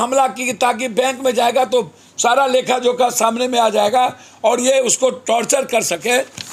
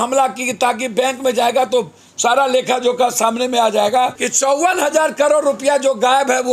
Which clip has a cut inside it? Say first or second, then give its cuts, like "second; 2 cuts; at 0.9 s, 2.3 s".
second; 1 cut; at 4.2 s